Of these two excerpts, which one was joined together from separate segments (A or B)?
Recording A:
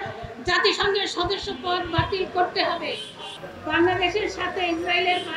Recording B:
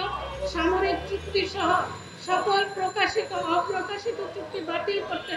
A